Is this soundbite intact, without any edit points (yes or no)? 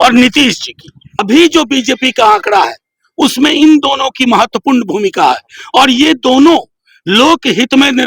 no